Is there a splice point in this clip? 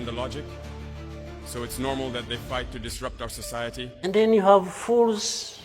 yes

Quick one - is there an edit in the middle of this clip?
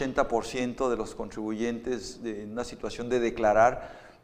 no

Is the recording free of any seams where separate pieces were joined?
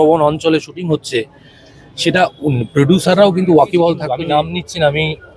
no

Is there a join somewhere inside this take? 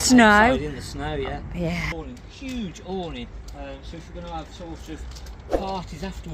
yes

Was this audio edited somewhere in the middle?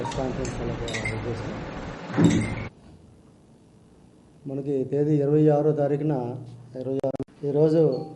yes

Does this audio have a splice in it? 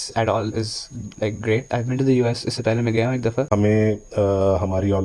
yes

